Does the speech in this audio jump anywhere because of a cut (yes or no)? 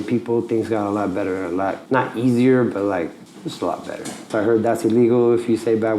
yes